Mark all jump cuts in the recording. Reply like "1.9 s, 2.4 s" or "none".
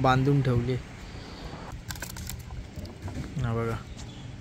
1.7 s